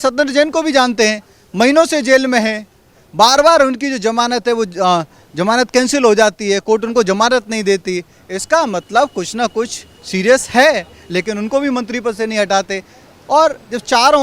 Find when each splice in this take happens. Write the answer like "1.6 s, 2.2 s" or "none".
none